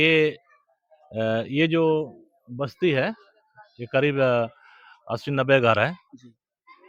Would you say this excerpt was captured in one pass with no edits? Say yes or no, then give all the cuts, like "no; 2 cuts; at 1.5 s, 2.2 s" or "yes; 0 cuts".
yes; 0 cuts